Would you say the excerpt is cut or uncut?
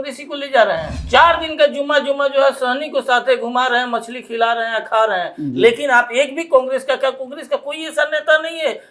cut